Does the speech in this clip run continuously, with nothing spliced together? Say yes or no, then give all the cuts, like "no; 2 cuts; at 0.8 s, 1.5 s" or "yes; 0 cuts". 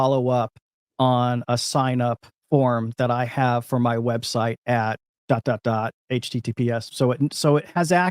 no; 2 cuts; at 2.3 s, 5.1 s